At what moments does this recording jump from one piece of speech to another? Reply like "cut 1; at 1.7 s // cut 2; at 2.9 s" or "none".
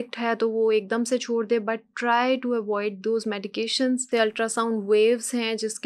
cut 1; at 4.0 s

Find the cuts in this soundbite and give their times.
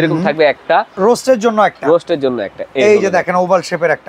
cut 1; at 0.9 s

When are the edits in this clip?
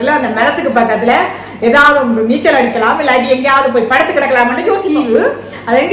cut 1; at 4.8 s

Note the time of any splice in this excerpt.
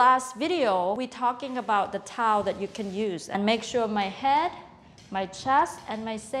cut 1; at 1.0 s // cut 2; at 3.4 s

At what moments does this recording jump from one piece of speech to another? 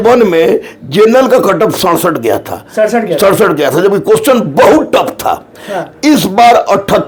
none

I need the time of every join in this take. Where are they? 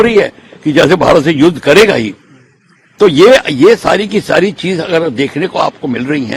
none

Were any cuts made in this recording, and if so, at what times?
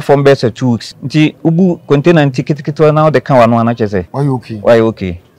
cut 1; at 0.9 s // cut 2; at 4.1 s

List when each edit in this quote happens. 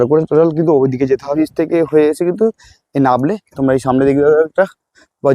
cut 1; at 1.3 s

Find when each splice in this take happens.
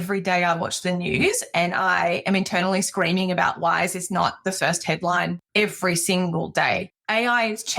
cut 1; at 5.4 s // cut 2; at 6.9 s

